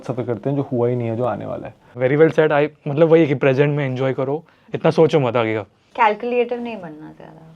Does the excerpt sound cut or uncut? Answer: uncut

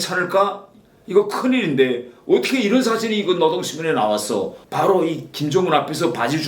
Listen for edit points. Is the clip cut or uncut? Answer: cut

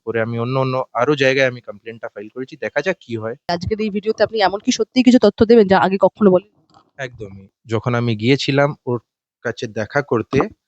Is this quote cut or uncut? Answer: cut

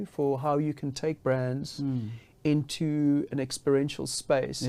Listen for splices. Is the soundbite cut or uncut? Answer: uncut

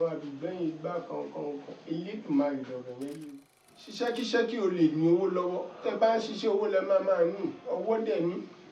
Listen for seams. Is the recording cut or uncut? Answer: cut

